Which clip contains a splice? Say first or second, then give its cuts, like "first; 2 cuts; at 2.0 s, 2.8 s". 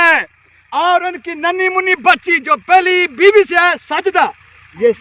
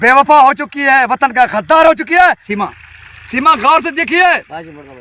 second; 1 cut; at 2.5 s